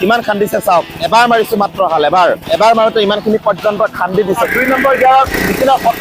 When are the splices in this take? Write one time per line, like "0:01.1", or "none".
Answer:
0:01.0
0:02.4
0:04.4